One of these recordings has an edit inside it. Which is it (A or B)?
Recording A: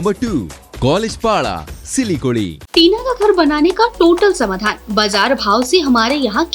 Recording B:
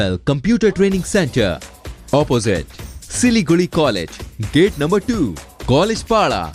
A